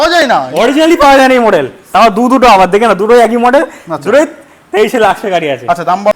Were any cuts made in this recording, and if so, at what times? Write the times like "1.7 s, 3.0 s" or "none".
none